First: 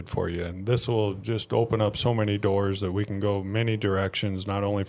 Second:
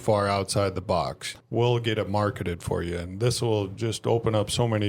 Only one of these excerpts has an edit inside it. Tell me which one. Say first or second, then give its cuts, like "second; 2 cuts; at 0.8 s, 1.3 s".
second; 1 cut; at 1.3 s